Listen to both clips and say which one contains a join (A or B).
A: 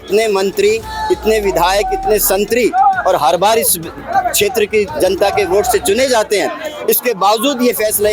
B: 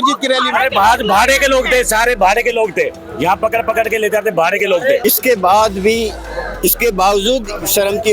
B